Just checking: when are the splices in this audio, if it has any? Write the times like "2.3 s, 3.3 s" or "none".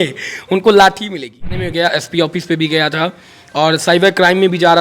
1.6 s